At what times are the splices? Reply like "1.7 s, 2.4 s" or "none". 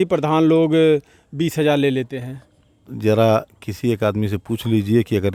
none

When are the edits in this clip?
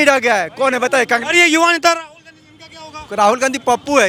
none

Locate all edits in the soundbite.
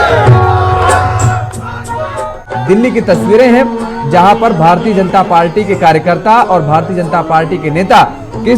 2.5 s

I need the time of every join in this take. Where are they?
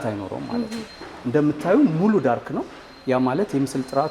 none

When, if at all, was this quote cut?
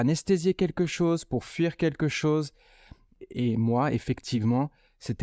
3.1 s

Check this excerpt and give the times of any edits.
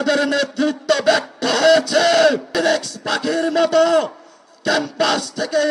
2.5 s

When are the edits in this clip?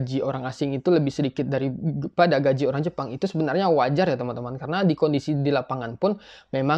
none

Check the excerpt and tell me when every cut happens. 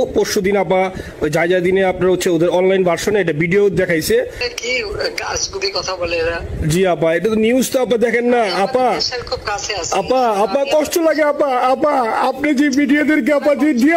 4.4 s

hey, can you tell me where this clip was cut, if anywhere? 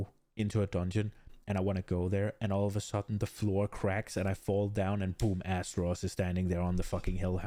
none

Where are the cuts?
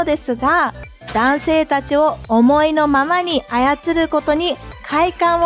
0.9 s

